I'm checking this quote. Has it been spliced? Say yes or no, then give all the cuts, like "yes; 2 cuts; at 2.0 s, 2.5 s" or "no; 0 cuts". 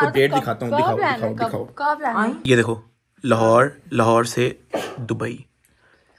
no; 0 cuts